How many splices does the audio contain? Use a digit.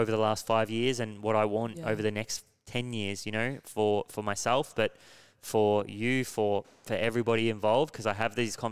0